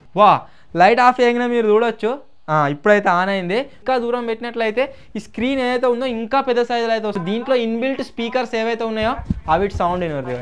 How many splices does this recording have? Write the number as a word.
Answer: two